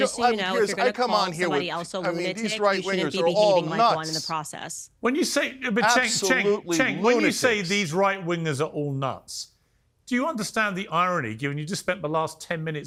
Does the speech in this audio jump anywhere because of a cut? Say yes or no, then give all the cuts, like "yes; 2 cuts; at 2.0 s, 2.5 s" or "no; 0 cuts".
no; 0 cuts